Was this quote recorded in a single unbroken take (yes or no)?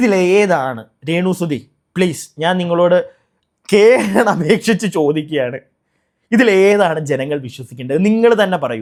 yes